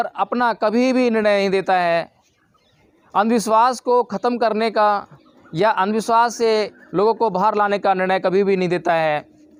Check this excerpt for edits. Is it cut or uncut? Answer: uncut